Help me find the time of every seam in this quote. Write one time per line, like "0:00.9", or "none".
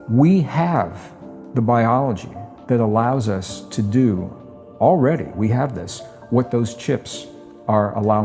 none